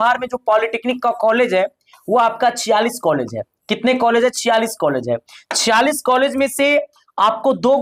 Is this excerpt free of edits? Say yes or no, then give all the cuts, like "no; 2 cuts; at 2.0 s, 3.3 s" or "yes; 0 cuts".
yes; 0 cuts